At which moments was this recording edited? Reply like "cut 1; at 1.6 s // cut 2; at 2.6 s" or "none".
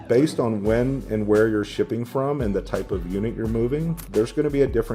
cut 1; at 4.0 s